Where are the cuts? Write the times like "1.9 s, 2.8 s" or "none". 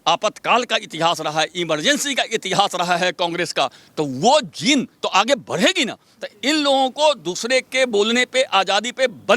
none

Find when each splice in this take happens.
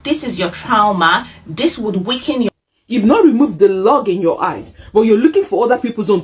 2.5 s

